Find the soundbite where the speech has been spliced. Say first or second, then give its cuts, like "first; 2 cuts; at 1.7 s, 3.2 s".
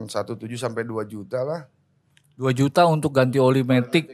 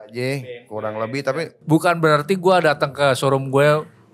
second; 1 cut; at 1.5 s